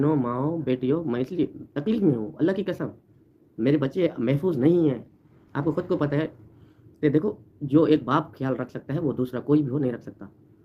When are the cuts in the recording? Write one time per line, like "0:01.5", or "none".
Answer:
none

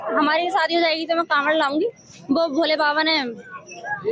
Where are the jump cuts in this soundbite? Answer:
0:02.9

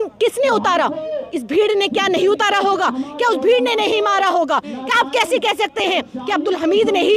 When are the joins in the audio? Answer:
none

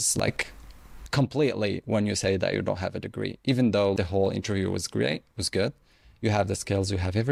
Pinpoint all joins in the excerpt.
none

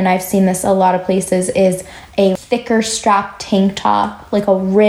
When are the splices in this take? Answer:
0:02.3

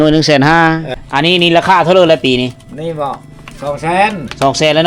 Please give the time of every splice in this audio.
0:00.9

